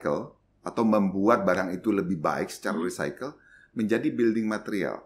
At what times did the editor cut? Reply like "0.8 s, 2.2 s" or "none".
none